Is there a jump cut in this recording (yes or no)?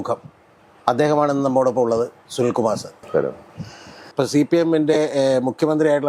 yes